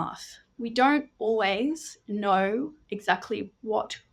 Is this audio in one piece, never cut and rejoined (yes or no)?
yes